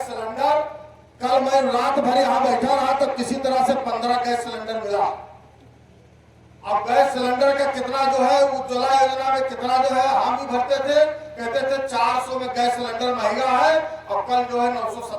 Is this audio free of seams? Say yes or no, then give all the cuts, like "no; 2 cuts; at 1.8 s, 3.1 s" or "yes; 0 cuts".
yes; 0 cuts